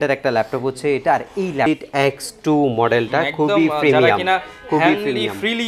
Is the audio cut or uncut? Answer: cut